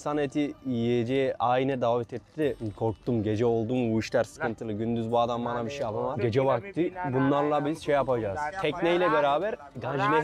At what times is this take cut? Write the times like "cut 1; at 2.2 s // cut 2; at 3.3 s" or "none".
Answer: cut 1; at 2.7 s // cut 2; at 6.2 s // cut 3; at 8.5 s